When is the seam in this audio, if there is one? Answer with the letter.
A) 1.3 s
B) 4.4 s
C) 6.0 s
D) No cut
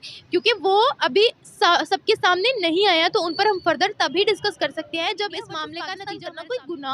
C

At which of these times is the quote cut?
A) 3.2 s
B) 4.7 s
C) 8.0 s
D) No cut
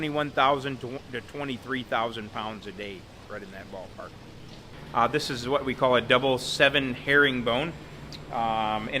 B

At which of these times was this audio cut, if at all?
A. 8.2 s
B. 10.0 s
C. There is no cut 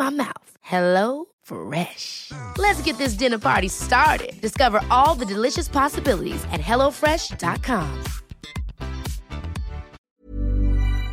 B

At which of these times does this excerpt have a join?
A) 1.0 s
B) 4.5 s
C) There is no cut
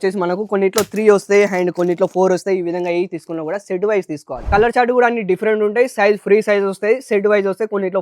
B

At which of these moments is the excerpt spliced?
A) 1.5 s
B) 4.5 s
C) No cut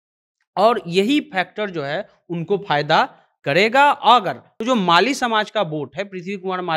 B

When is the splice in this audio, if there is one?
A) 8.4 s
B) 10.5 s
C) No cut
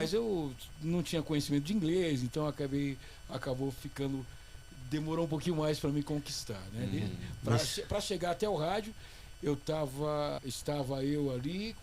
B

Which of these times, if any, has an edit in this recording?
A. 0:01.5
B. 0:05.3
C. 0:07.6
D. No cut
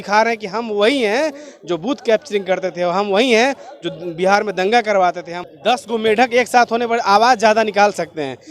B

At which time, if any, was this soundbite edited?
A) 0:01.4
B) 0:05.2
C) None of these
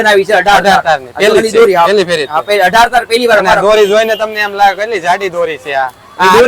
C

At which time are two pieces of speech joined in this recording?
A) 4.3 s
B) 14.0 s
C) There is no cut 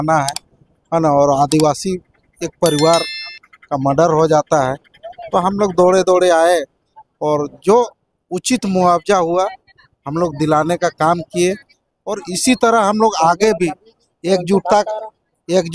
C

